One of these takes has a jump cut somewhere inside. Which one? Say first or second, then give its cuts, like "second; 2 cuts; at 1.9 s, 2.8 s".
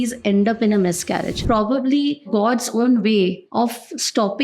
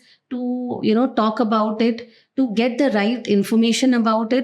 first; 3 cuts; at 1.4 s, 2.3 s, 3.4 s